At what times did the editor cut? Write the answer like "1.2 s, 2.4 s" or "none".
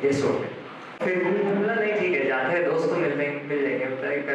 1.0 s

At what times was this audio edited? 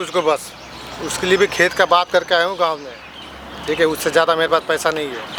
none

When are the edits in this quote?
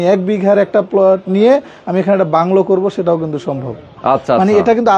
none

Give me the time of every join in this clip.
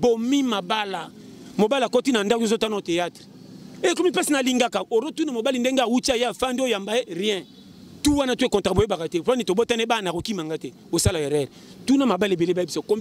none

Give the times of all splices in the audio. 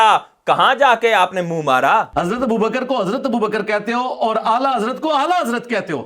2.1 s

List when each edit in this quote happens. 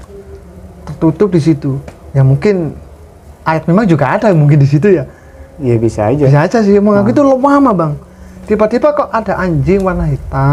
none

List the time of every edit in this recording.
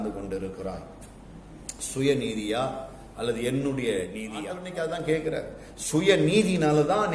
4.6 s

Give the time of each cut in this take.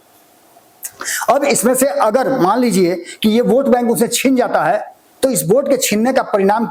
none

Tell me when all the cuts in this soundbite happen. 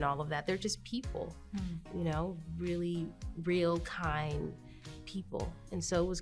none

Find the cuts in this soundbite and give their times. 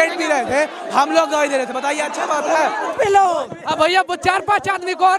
2.9 s

